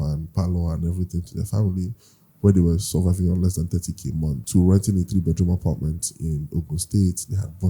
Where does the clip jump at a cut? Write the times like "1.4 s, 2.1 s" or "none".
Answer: 4.4 s